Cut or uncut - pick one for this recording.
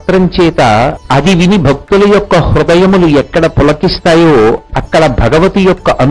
cut